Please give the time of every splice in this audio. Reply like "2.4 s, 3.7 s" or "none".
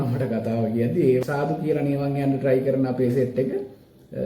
1.2 s